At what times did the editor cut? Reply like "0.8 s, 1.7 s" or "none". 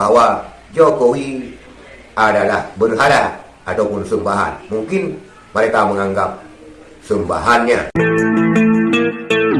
7.9 s